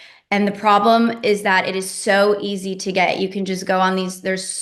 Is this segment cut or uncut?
uncut